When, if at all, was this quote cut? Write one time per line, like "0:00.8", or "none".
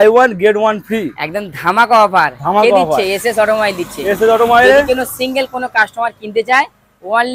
none